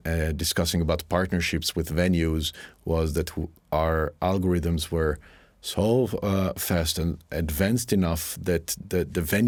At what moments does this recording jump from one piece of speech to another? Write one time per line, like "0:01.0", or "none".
none